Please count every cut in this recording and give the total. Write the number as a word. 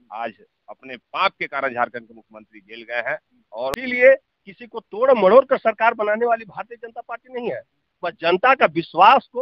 one